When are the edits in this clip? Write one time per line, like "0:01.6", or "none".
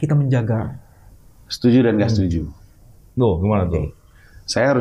none